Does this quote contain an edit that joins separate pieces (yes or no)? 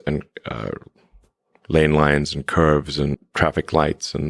yes